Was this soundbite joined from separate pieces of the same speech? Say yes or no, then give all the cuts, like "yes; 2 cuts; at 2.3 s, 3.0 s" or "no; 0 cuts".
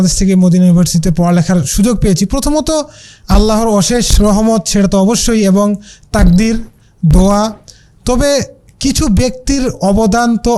no; 0 cuts